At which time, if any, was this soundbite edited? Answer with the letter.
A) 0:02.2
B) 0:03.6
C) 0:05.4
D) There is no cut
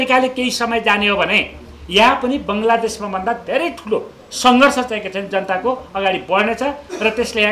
D